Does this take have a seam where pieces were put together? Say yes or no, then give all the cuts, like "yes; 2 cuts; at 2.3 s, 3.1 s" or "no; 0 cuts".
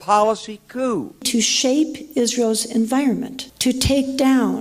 yes; 1 cut; at 1.2 s